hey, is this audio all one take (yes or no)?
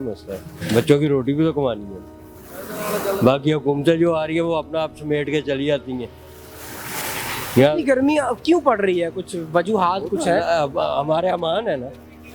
yes